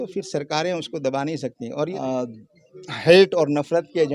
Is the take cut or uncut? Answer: cut